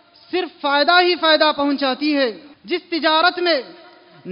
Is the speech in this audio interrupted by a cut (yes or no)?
yes